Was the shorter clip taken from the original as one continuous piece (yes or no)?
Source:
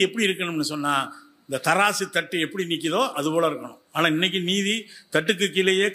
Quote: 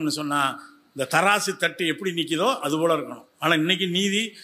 yes